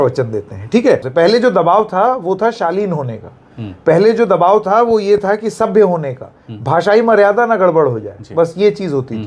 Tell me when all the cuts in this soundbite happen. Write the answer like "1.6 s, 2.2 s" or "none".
1.1 s